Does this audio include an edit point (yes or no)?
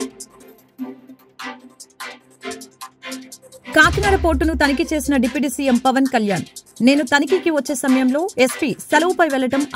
yes